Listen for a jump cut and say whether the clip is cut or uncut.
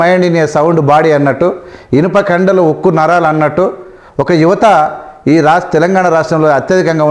uncut